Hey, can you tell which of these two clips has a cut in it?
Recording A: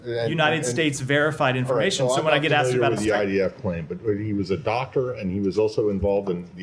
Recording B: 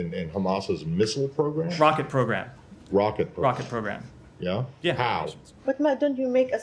B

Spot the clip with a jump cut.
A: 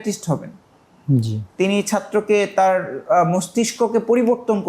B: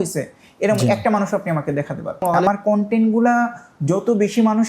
B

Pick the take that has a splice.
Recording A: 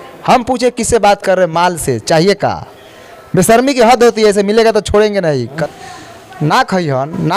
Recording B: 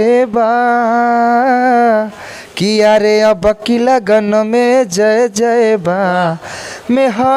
A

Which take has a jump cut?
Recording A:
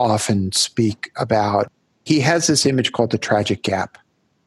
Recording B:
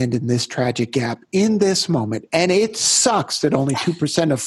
A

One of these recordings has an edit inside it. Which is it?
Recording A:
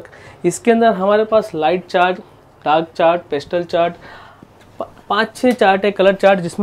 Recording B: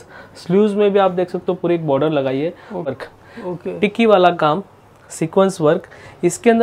B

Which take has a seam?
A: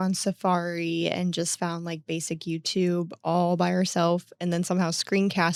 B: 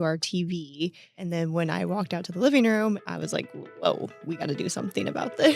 B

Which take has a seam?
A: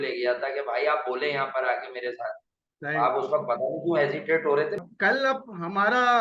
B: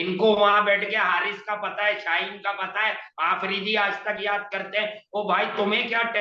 A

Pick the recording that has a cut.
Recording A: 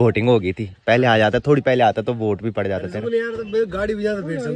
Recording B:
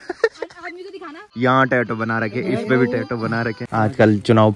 B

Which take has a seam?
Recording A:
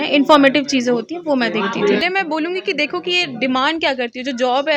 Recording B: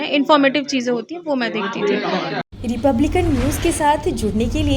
A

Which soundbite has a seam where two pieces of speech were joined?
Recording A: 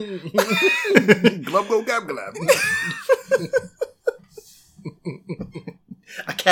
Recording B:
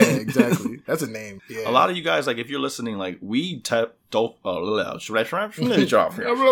B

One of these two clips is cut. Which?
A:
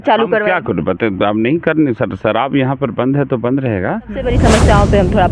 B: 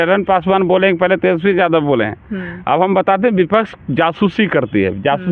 A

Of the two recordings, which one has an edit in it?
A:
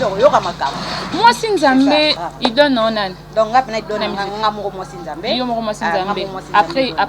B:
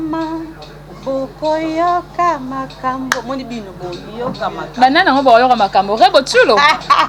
A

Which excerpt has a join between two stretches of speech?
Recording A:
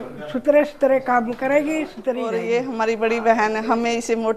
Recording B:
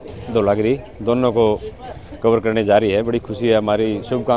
A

